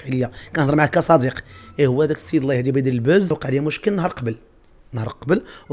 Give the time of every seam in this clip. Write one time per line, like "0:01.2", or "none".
0:03.4

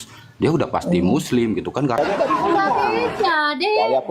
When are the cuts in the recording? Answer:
0:02.0

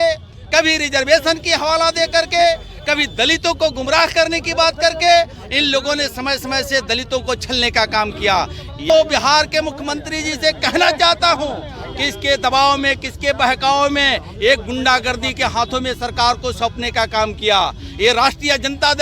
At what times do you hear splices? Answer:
0:08.9

